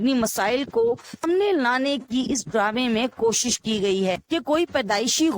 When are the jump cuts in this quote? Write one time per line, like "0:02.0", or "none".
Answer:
0:01.2
0:04.2